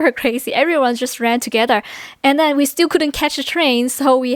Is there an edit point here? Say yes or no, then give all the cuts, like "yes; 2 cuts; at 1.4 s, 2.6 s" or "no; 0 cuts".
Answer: no; 0 cuts